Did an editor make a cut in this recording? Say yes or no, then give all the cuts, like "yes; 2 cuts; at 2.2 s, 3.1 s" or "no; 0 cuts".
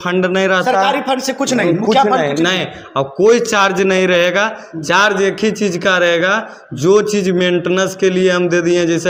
no; 0 cuts